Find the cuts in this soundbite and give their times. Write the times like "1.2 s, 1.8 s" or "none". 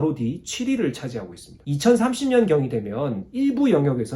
1.6 s